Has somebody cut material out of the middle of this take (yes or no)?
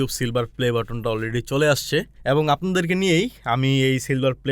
yes